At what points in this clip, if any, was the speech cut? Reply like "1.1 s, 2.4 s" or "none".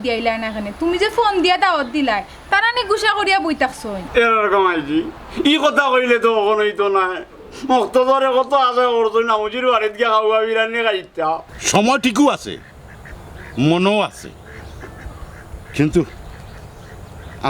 3.9 s, 11.5 s